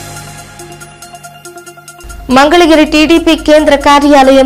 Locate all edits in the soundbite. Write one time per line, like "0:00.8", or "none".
0:01.5